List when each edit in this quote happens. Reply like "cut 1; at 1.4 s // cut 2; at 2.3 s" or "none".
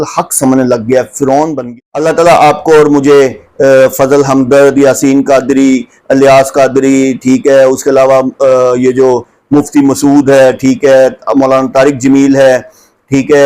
cut 1; at 1.6 s